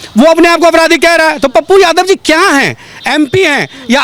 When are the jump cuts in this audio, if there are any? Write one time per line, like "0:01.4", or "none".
none